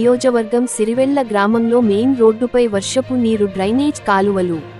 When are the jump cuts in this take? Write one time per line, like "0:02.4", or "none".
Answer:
none

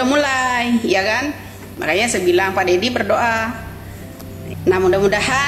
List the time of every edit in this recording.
none

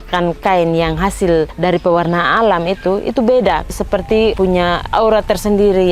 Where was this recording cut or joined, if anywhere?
0:03.7

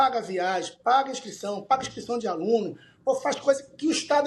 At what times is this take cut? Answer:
none

